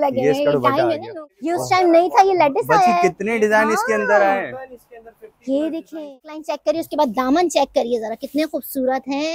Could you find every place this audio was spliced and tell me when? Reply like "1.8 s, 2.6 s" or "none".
1.1 s, 6.5 s